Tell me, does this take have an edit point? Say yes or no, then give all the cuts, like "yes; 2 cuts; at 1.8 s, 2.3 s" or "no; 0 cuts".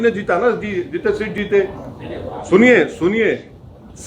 no; 0 cuts